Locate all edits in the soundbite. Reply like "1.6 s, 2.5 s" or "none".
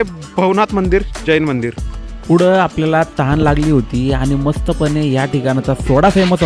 none